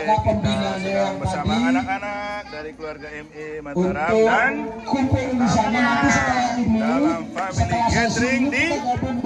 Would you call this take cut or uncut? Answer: uncut